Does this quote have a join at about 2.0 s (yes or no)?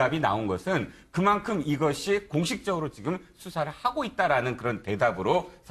yes